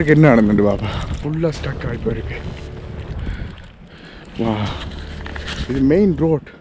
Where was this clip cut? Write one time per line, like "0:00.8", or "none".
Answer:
0:01.2